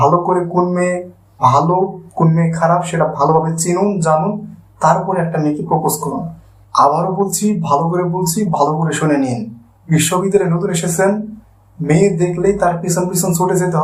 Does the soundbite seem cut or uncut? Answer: uncut